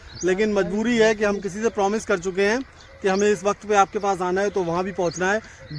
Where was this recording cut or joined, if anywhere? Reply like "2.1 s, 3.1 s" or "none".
none